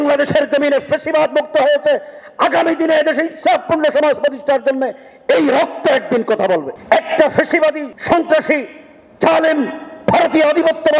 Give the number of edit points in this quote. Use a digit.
2